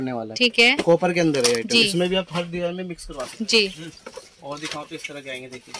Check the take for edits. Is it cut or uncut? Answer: uncut